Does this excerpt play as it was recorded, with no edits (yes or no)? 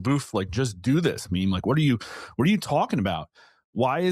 yes